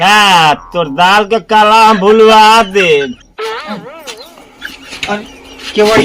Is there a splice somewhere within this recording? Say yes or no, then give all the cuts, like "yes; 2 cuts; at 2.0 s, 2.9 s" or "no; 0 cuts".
yes; 1 cut; at 3.4 s